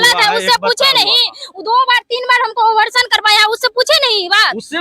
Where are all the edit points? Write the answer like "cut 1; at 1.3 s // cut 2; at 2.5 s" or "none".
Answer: none